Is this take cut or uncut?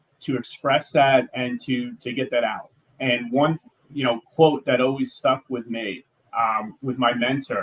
uncut